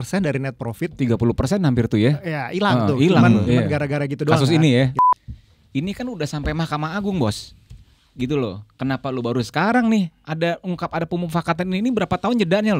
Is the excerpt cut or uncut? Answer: cut